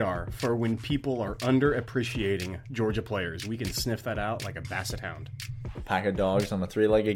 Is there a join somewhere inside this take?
yes; 1 cut; at 5.4 s

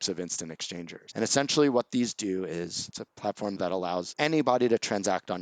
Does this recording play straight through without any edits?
no; 2 cuts; at 1.0 s, 3.6 s

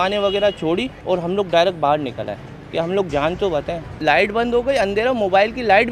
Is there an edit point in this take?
yes; 2 cuts; at 0.9 s, 3.8 s

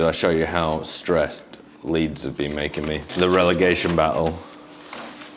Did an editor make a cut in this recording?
no; 0 cuts

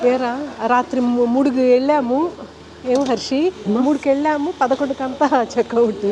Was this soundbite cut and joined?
no; 0 cuts

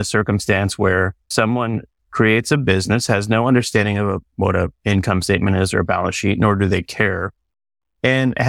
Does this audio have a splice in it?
yes; 1 cut; at 1.2 s

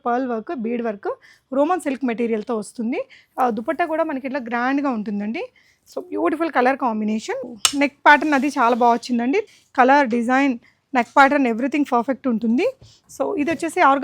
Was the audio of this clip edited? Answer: yes; 2 cuts; at 7.4 s, 9.4 s

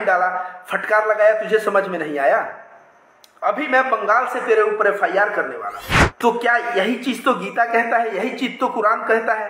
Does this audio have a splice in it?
yes; 1 cut; at 6.0 s

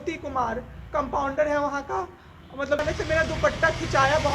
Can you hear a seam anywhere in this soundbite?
yes; 1 cut; at 2.8 s

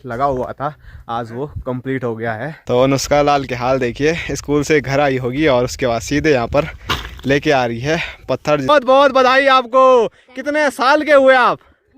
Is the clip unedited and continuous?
no; 2 cuts; at 2.6 s, 8.7 s

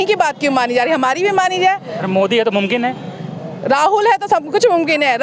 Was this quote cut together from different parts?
no; 0 cuts

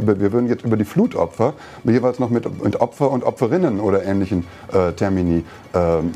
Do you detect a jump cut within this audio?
no; 0 cuts

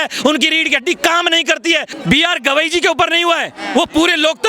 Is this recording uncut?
no; 1 cut; at 1.9 s

